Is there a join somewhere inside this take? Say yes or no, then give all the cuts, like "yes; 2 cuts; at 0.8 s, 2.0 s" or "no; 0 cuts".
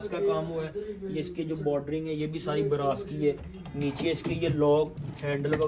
no; 0 cuts